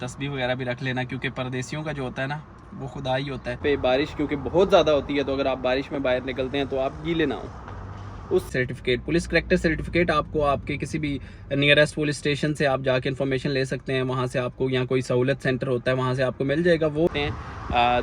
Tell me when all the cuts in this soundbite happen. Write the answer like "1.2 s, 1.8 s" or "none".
3.6 s, 8.5 s, 17.1 s

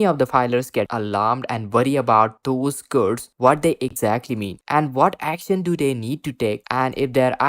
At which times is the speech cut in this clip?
0.9 s

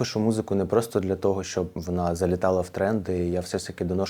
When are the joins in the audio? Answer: 1.8 s

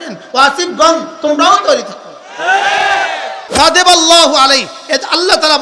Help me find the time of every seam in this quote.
3.4 s

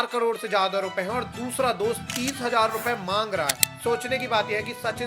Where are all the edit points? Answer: 3.7 s

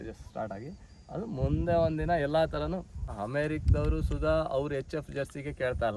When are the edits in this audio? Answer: 3.1 s

